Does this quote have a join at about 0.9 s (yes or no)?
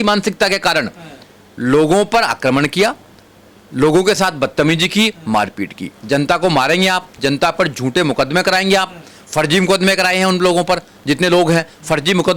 no